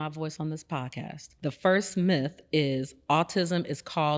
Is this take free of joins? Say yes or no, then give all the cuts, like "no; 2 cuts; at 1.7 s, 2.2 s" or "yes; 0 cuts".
no; 1 cut; at 1.2 s